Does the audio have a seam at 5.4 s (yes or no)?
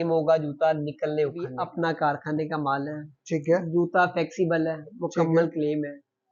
no